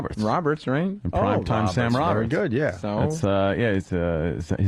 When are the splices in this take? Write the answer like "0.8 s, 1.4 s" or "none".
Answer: none